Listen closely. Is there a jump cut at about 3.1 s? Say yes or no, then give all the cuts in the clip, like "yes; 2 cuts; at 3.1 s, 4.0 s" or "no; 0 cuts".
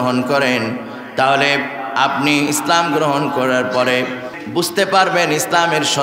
no; 1 cut; at 4.3 s